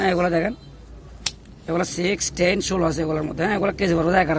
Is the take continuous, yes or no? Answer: yes